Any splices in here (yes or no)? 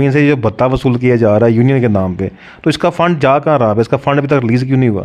no